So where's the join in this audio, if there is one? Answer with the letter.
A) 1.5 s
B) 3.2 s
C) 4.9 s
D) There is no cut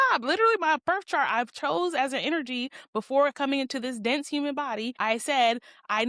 C